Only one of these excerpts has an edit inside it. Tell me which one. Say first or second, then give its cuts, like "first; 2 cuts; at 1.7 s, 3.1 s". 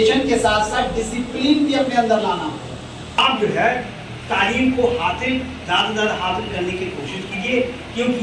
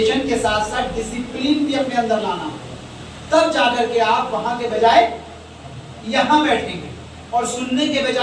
first; 1 cut; at 3.1 s